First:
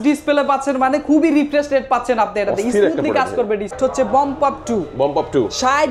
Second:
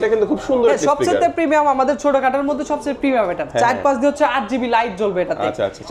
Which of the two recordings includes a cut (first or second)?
first